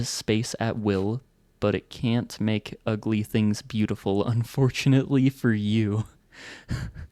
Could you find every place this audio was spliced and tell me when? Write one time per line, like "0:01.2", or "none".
none